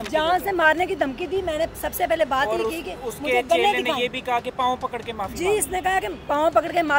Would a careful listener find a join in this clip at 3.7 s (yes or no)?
no